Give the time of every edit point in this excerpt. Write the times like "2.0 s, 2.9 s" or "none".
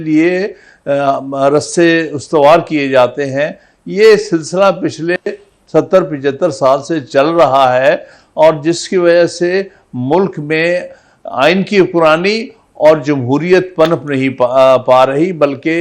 none